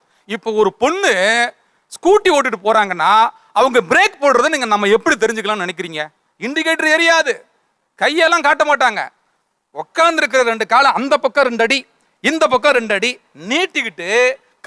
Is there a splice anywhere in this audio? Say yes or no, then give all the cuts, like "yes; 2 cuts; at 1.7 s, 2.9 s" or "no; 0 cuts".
no; 0 cuts